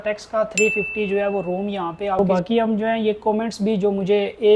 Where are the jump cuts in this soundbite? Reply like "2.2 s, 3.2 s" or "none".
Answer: 2.2 s